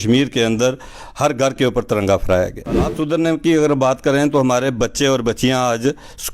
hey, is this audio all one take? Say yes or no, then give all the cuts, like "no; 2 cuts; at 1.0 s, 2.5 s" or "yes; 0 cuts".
no; 1 cut; at 3.0 s